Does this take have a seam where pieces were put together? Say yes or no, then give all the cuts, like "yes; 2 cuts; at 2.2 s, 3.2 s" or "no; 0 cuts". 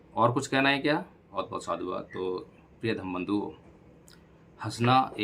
yes; 1 cut; at 1.3 s